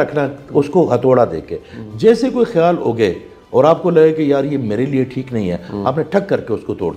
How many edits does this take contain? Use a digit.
0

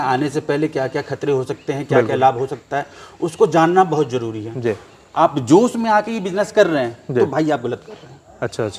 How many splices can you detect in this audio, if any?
0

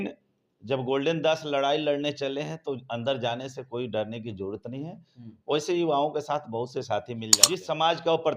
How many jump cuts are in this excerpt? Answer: 1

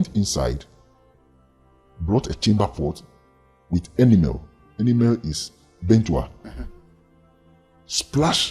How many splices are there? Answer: 0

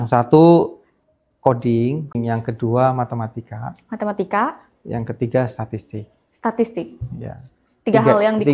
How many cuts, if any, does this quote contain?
1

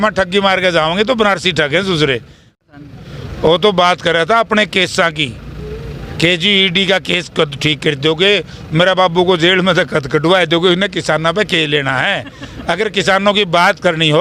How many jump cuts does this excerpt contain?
1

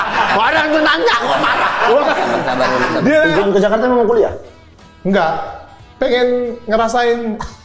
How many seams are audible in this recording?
1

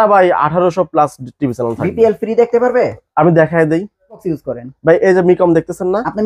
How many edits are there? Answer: 1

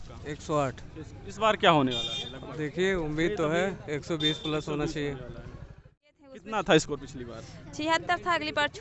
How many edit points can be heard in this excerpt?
1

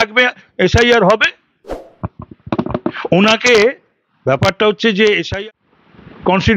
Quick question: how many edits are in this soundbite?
1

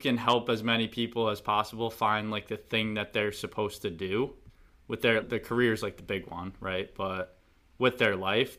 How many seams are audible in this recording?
0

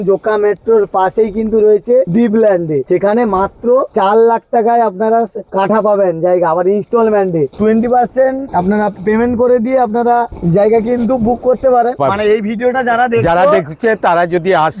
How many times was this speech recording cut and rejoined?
7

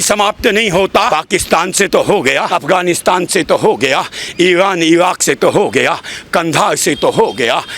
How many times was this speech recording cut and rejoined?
2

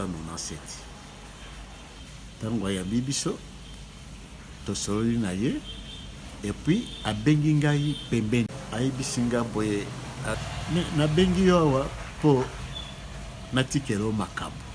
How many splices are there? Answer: 1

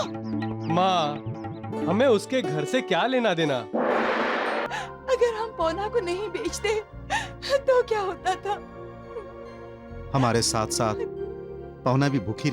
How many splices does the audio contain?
1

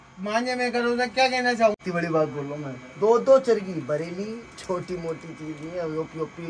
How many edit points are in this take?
1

